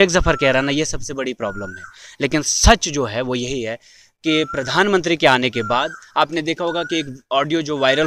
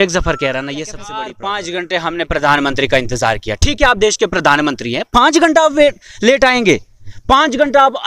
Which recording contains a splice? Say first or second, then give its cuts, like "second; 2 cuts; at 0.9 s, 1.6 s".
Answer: second; 1 cut; at 1.1 s